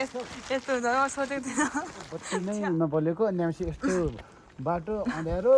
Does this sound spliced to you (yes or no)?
yes